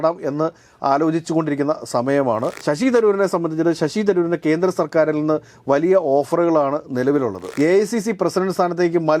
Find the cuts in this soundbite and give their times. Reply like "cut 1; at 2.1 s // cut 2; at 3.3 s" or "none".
cut 1; at 2.5 s // cut 2; at 7.4 s

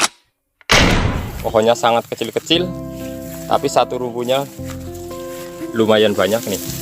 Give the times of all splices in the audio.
cut 1; at 1.3 s

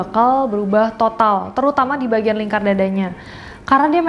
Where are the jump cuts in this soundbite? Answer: none

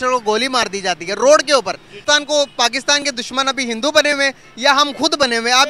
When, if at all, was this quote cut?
cut 1; at 2.0 s

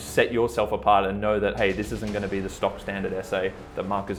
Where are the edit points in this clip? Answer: none

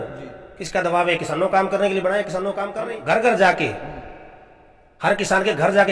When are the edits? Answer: cut 1; at 2.6 s

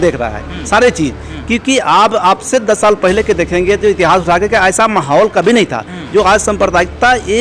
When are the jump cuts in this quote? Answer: none

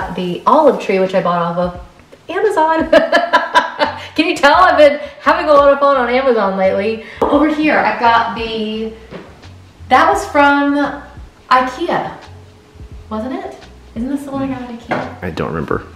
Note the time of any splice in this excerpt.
cut 1; at 7.1 s

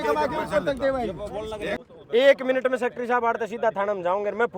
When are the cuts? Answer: cut 1; at 1.8 s

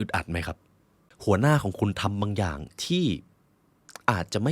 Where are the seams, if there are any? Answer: cut 1; at 1.0 s

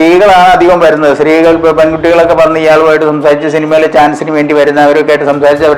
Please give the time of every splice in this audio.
none

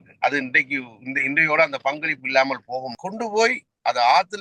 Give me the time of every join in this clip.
cut 1; at 3.0 s

